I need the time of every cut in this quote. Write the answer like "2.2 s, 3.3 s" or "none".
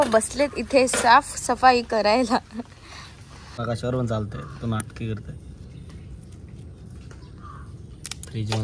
3.5 s